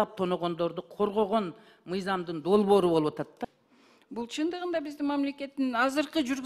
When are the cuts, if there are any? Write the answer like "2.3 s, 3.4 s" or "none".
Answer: 3.4 s